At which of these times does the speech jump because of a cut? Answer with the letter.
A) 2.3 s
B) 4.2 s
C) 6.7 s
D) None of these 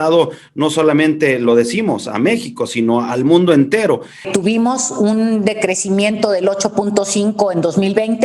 B